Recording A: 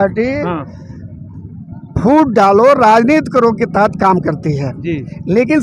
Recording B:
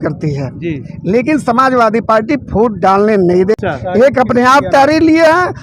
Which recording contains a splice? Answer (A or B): B